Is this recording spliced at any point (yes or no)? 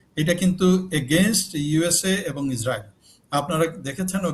no